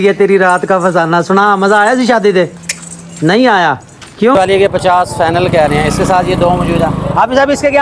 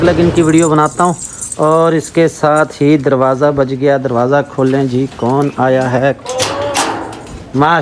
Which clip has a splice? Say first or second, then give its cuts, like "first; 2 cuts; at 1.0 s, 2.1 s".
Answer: first; 1 cut; at 4.3 s